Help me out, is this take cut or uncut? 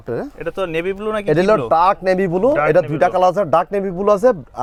uncut